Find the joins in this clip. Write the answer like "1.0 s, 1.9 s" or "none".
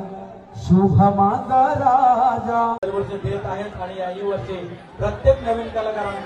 2.8 s